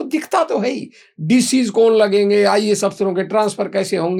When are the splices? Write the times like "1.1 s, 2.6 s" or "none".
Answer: none